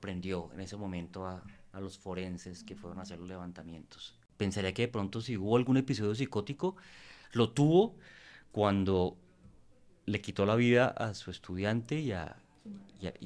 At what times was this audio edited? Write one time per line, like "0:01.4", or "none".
0:04.2